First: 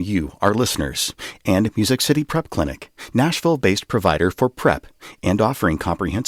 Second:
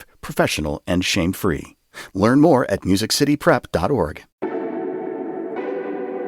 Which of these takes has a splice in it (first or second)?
second